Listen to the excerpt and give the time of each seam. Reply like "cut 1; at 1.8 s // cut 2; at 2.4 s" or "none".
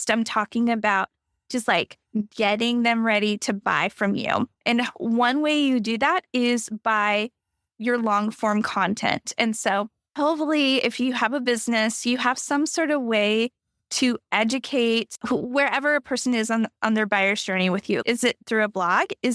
cut 1; at 10.0 s // cut 2; at 15.1 s